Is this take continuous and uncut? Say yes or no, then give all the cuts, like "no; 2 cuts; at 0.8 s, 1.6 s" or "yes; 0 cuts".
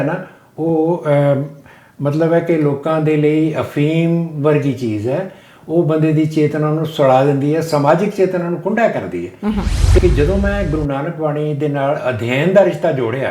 no; 1 cut; at 10.0 s